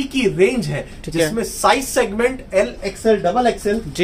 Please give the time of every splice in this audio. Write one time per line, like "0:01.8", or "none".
none